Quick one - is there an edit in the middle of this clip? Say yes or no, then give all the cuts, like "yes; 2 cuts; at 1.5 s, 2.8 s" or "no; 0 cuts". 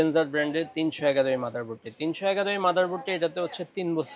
no; 0 cuts